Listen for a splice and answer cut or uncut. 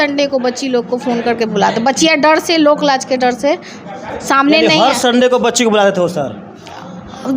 uncut